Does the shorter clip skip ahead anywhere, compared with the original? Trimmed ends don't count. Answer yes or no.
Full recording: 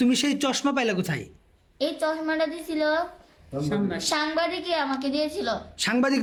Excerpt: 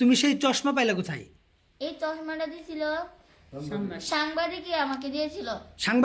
no